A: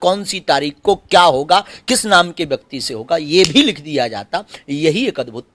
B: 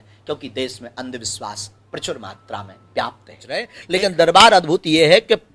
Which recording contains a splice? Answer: B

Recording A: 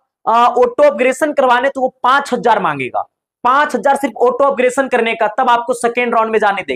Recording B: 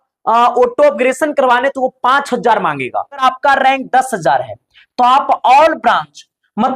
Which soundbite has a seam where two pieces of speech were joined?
B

